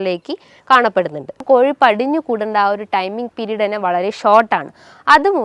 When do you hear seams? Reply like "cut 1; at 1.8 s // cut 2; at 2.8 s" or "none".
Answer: cut 1; at 1.4 s

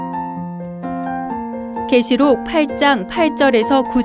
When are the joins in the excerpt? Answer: none

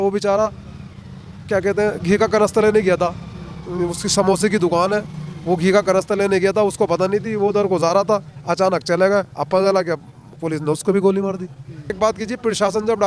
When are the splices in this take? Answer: cut 1; at 12.0 s

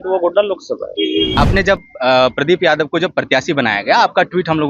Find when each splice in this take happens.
cut 1; at 1.4 s

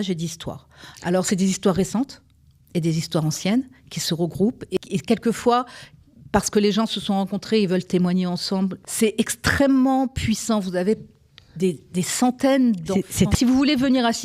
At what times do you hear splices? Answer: cut 1; at 4.8 s // cut 2; at 8.8 s // cut 3; at 13.3 s

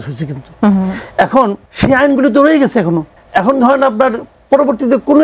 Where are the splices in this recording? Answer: cut 1; at 1.6 s // cut 2; at 3.2 s

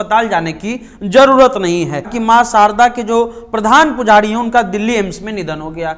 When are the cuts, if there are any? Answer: cut 1; at 2.1 s

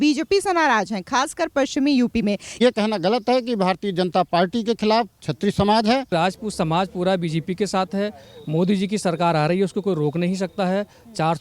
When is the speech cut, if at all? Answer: cut 1; at 2.6 s // cut 2; at 6.1 s

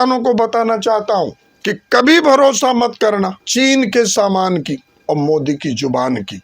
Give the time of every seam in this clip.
cut 1; at 1.5 s // cut 2; at 3.4 s // cut 3; at 4.9 s

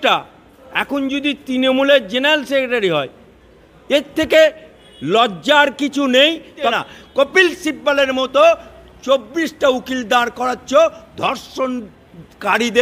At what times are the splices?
cut 1; at 6.7 s

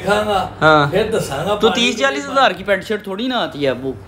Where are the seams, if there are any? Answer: none

